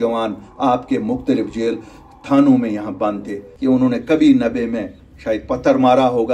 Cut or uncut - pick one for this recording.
cut